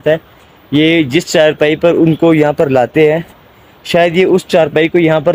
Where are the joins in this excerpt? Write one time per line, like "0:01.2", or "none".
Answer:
none